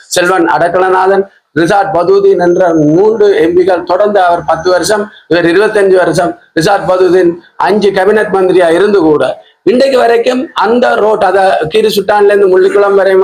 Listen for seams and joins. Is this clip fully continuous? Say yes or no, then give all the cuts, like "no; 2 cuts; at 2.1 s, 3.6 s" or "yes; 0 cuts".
yes; 0 cuts